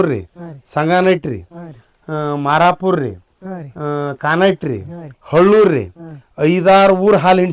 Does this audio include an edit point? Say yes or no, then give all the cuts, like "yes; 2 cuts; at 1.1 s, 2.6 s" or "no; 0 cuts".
no; 0 cuts